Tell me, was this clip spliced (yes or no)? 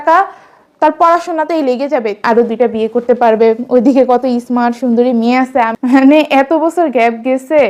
yes